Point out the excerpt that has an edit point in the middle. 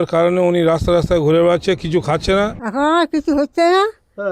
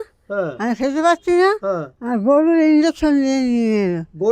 first; 1 cut; at 2.5 s

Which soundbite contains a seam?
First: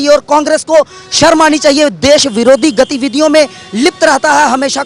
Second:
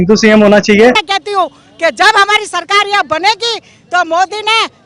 second; 1 cut; at 1.1 s

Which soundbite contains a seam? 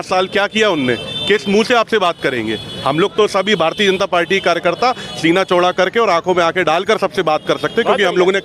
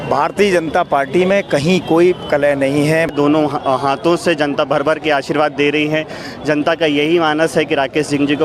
second; 1 cut; at 3.1 s

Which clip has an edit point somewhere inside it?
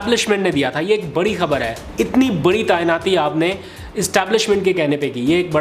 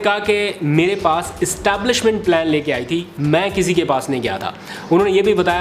first; 1 cut; at 1.8 s

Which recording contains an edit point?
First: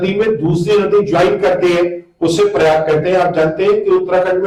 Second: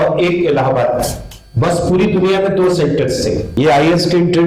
second; 1 cut; at 3.5 s

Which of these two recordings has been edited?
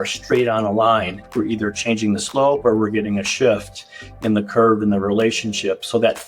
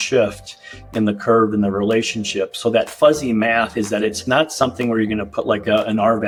first; 1 cut; at 1.2 s

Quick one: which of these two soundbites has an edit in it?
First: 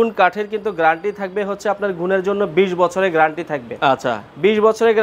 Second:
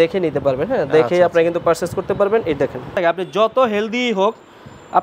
second; 1 cut; at 3.0 s

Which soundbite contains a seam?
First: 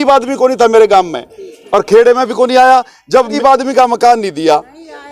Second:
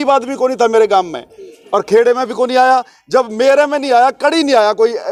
first; 1 cut; at 3.3 s

